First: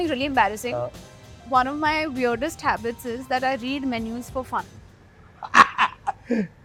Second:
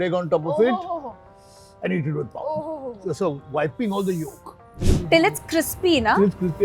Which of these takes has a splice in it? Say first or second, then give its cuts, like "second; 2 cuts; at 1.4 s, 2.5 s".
second; 1 cut; at 4.8 s